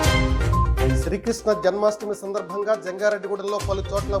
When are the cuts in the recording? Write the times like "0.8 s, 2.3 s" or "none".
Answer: 1.0 s